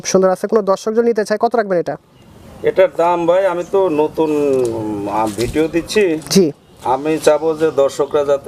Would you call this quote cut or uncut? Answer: uncut